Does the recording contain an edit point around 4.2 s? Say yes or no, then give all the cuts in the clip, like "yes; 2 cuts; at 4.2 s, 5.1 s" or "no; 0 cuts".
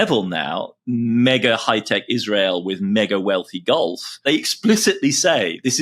yes; 1 cut; at 4.2 s